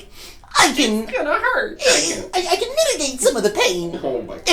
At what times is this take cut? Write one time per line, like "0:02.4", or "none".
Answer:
0:02.2